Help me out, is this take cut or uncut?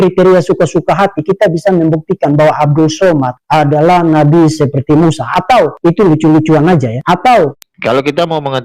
cut